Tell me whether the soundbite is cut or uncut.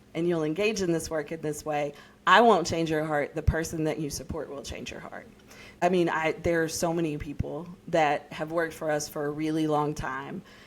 cut